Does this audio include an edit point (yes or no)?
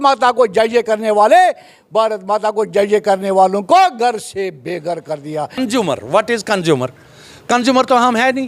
yes